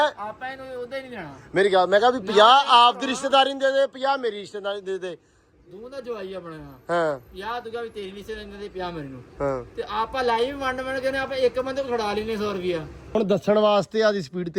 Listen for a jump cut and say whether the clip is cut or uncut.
cut